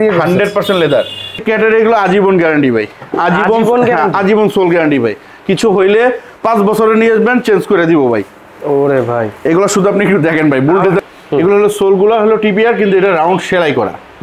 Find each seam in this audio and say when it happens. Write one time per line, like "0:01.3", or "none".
0:01.4
0:11.0